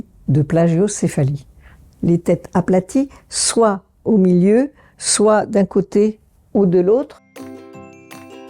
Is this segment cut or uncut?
cut